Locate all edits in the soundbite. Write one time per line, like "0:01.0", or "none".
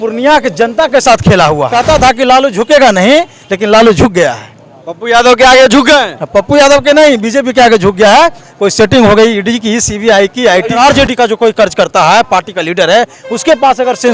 0:01.8
0:10.8